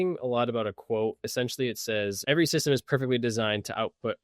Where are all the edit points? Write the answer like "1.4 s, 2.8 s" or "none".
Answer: 1.3 s, 2.2 s